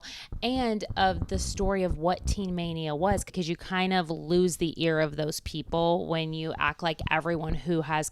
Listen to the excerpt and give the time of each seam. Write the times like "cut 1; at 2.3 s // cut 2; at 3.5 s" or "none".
cut 1; at 3.3 s